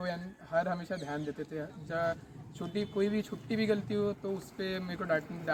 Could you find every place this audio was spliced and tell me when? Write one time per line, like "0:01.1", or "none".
none

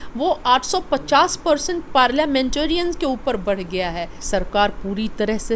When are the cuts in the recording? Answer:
0:04.2

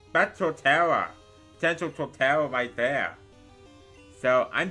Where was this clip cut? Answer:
none

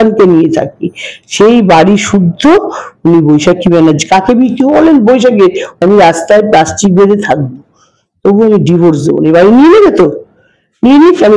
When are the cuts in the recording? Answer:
0:05.8

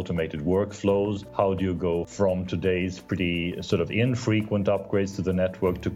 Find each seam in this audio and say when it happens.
0:01.6

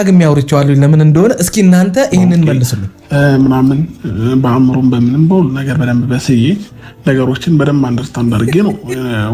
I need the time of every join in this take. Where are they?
0:03.0

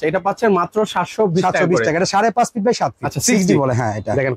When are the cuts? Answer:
0:03.1

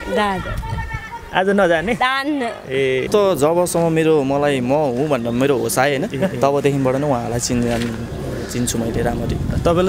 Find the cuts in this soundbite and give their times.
0:03.1

